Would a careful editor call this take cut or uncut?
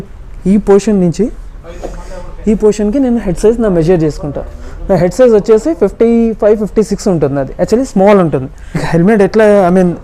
cut